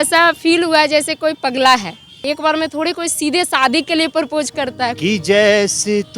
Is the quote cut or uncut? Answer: cut